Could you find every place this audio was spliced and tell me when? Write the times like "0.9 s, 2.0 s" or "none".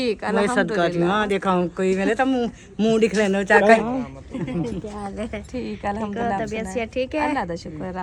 3.8 s